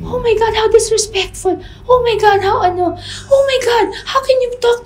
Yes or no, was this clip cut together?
no